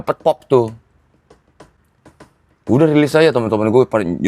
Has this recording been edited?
no; 0 cuts

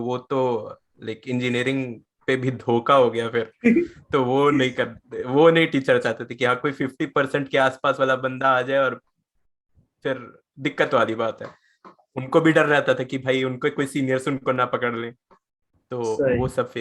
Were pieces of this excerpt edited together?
no; 0 cuts

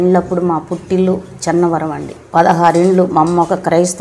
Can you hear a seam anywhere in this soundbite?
yes; 1 cut; at 2.1 s

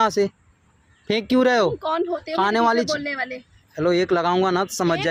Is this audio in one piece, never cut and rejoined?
yes; 0 cuts

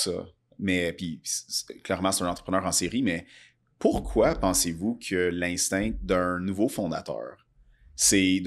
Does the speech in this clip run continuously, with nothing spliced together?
yes; 0 cuts

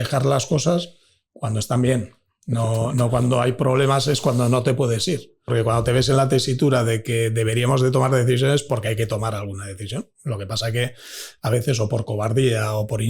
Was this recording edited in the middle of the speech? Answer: yes; 1 cut; at 5.5 s

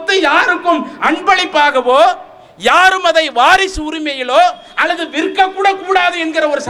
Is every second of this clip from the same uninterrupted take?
yes; 0 cuts

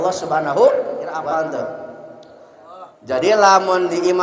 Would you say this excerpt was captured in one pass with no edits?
no; 1 cut; at 1.1 s

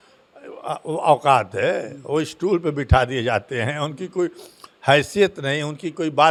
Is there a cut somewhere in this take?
no; 0 cuts

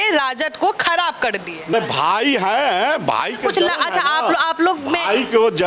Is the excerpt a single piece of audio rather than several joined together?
no; 1 cut; at 1.7 s

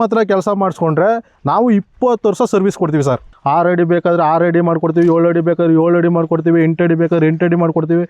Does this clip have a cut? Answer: yes; 1 cut; at 3.3 s

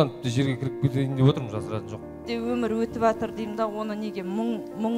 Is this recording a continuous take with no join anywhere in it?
no; 1 cut; at 2.2 s

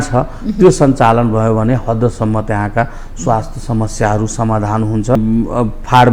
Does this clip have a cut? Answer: yes; 1 cut; at 5.2 s

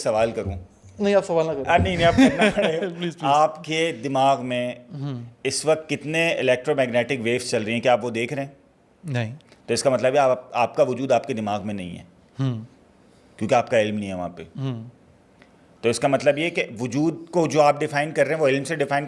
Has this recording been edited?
no; 0 cuts

